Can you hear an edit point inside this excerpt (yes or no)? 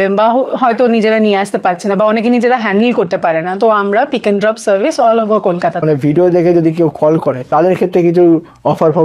yes